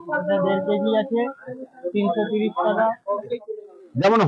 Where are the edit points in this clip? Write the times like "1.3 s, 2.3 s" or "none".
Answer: 3.4 s